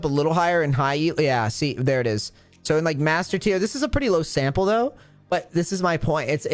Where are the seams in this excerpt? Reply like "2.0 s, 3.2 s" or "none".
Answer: none